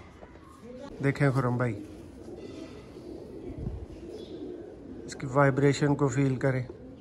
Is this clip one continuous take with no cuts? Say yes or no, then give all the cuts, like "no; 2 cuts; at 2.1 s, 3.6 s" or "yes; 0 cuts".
no; 1 cut; at 0.9 s